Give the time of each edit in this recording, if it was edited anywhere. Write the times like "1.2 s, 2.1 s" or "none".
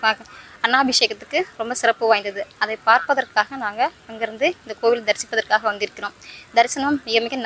none